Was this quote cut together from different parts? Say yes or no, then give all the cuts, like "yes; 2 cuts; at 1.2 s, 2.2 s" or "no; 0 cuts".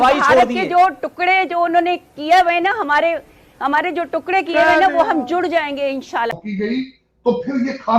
yes; 1 cut; at 6.3 s